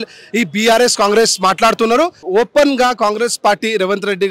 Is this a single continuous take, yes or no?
no